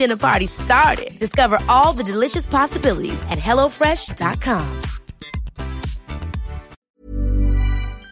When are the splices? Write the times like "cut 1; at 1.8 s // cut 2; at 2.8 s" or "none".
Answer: cut 1; at 6.8 s